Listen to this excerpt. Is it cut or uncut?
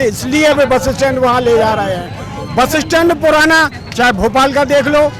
uncut